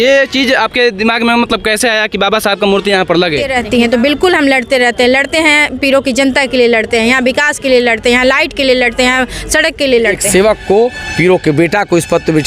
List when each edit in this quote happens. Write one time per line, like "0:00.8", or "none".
0:03.5
0:10.2